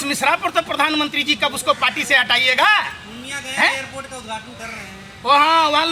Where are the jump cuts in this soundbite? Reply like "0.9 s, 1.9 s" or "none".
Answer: none

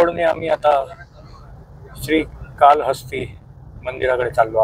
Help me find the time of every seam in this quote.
none

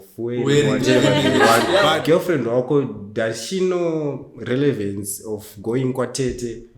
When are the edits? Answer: 1.8 s

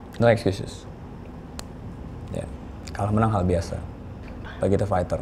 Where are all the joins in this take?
none

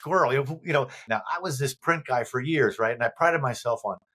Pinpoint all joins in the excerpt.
1.1 s

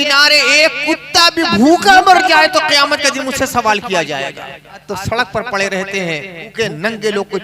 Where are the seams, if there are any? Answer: 4.8 s, 6.5 s

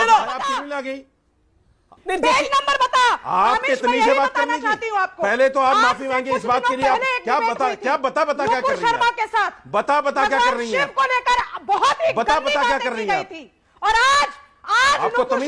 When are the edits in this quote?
2.0 s

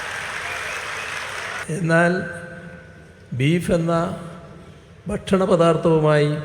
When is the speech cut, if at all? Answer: 1.6 s

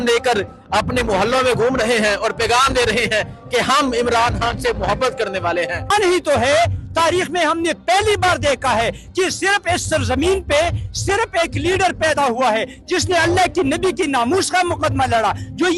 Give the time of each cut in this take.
5.9 s

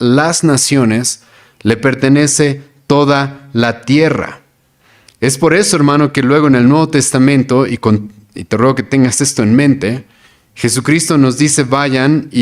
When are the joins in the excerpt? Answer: none

